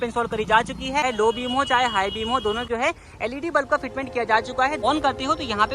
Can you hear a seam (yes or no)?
yes